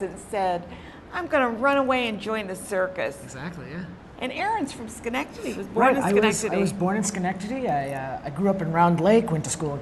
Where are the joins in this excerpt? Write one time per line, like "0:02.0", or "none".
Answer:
0:06.7